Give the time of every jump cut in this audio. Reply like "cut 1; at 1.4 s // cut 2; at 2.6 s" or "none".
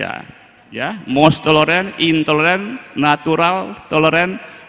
none